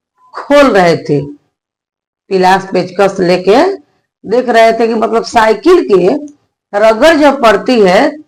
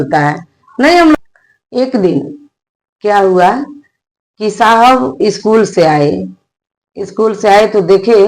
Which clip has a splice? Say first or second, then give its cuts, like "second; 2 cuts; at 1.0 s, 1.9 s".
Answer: second; 1 cut; at 1.1 s